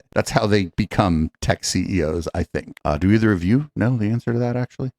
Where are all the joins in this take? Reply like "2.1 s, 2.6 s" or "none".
2.7 s